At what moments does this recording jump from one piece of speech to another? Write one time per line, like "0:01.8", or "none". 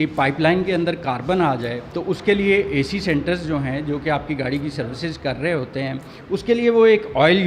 none